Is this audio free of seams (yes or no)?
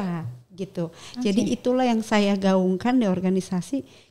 yes